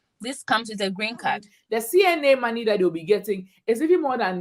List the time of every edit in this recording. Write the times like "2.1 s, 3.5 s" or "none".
1.5 s